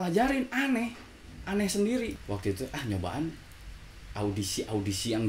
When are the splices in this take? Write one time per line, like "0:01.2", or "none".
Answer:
0:02.2